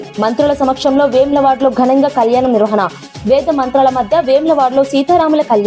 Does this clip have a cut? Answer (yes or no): no